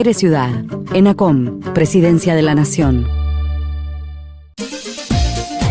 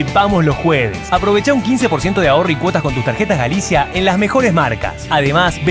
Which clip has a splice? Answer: first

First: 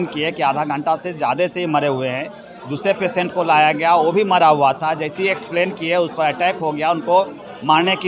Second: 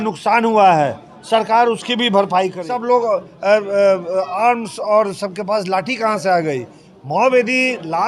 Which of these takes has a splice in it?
second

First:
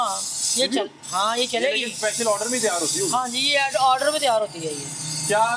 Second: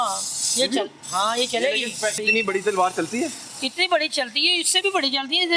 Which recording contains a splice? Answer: second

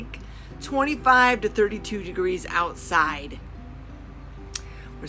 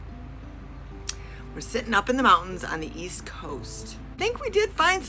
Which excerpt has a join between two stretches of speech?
second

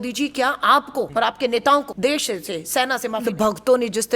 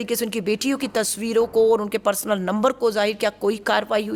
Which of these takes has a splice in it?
first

